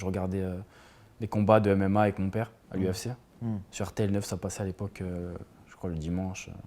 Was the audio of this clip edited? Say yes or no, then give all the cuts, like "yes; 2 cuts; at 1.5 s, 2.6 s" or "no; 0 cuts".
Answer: no; 0 cuts